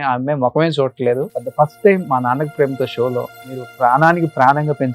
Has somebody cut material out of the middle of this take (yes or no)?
yes